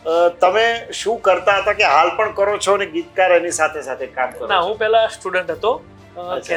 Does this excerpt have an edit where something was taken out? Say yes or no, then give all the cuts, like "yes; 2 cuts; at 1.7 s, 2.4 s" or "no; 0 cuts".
no; 0 cuts